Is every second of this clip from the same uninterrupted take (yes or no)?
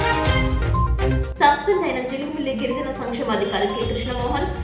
no